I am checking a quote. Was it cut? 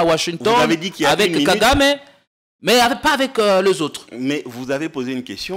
no; 0 cuts

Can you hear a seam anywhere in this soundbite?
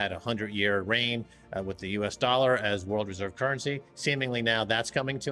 no; 0 cuts

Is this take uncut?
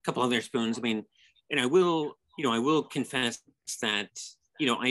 yes; 0 cuts

